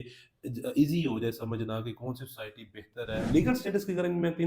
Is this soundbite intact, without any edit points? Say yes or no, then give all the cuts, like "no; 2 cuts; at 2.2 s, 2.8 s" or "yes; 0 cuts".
no; 1 cut; at 3.3 s